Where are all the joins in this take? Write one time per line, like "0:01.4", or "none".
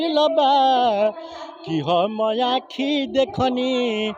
none